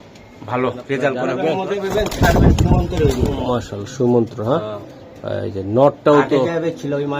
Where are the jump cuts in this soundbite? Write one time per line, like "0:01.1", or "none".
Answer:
0:01.2

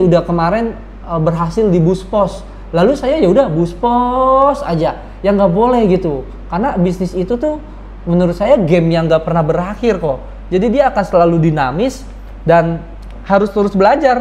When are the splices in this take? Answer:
none

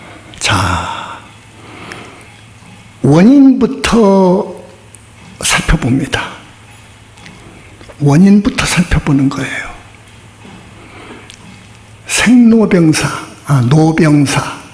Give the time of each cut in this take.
0:02.5
0:10.0

